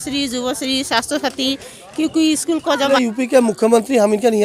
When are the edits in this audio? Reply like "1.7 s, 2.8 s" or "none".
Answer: 2.9 s